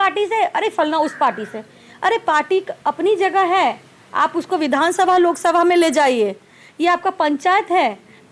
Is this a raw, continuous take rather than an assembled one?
yes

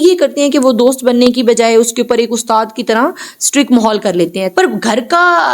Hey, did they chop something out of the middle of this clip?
yes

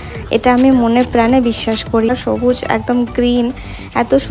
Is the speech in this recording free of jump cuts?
no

